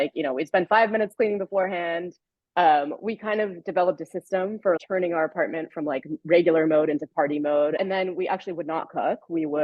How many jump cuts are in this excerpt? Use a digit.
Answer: 2